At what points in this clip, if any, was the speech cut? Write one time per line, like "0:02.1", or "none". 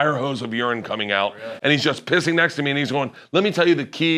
none

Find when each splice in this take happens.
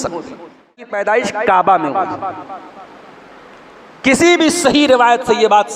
0:00.9

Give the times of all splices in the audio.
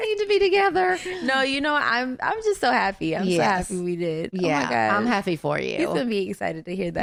none

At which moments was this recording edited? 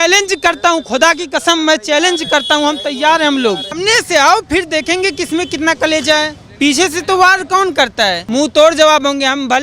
0:03.8
0:06.4
0:08.2

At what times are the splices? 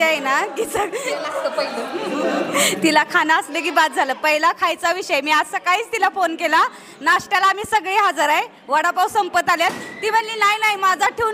none

